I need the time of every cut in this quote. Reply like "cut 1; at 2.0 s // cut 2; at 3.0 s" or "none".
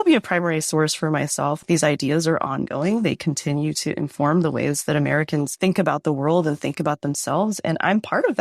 cut 1; at 1.6 s